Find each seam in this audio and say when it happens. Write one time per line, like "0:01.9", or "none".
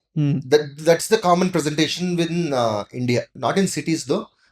0:03.3